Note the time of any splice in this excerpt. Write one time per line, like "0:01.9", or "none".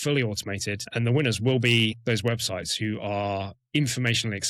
0:00.8
0:02.0
0:03.6